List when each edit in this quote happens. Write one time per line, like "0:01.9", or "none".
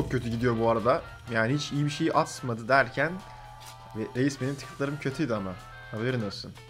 none